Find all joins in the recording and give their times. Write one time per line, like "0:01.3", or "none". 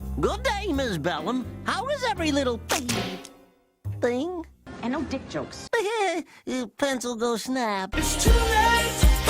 0:05.6
0:07.9